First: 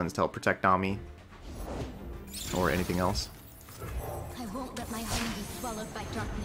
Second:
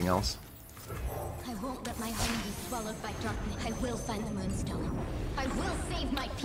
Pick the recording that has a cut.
first; 1 cut; at 1.2 s

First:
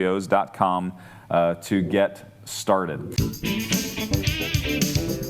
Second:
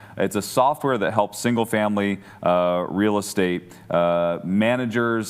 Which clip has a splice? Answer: first; 1 cut; at 3.1 s

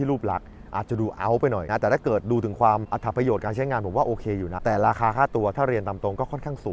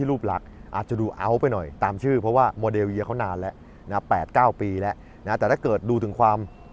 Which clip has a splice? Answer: first; 3 cuts; at 1.6 s, 2.9 s, 4.5 s

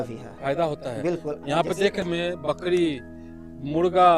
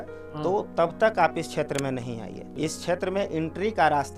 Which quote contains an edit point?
first; 1 cut; at 2.0 s

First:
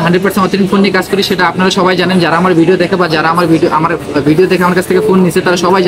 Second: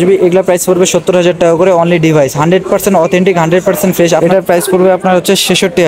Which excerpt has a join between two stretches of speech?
second; 1 cut; at 4.2 s

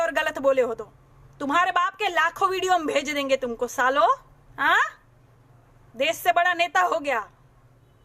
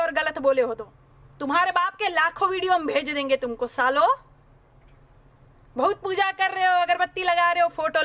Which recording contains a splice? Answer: first; 1 cut; at 4.4 s

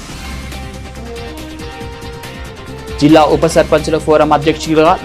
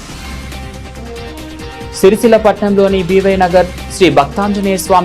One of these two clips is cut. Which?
second; 1 cut; at 2.0 s

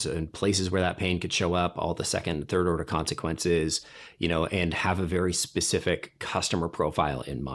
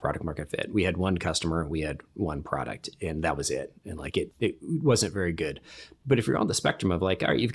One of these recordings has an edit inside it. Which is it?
second; 1 cut; at 4.3 s

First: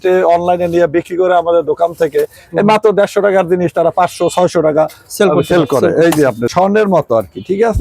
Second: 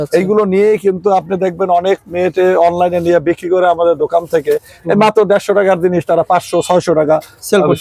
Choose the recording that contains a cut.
first; 1 cut; at 6.5 s

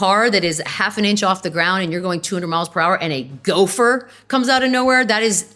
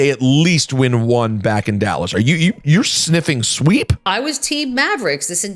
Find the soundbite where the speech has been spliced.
second; 1 cut; at 4.1 s

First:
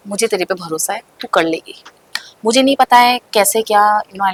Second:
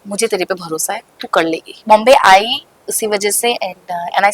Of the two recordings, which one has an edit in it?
second; 1 cut; at 1.7 s

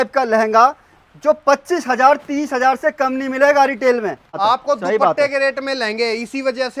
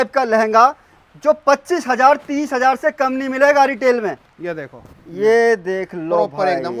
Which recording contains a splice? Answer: first; 1 cut; at 4.4 s

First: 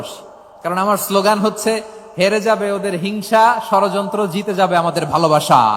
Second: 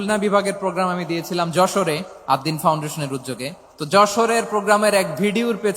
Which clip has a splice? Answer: second; 2 cuts; at 2.1 s, 3.7 s

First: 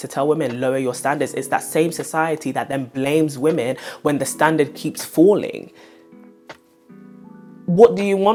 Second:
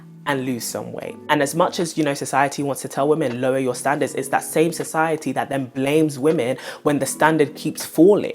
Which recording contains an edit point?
second; 1 cut; at 1.2 s

